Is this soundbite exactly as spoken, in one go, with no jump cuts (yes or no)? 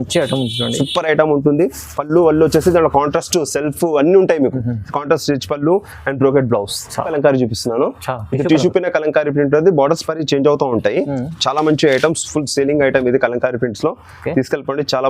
no